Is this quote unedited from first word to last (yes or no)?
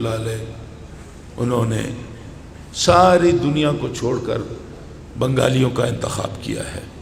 yes